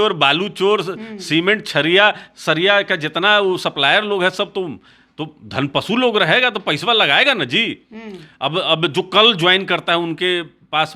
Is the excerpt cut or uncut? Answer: uncut